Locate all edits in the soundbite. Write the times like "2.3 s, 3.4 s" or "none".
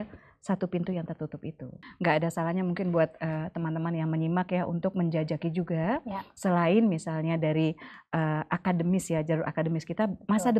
1.9 s